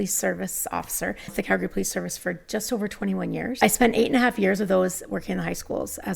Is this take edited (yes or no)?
yes